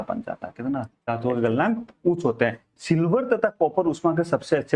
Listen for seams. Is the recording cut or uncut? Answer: cut